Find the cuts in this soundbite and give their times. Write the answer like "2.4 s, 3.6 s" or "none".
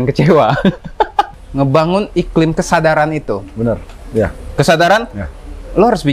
1.3 s